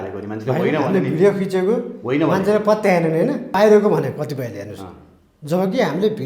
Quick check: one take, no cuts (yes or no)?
no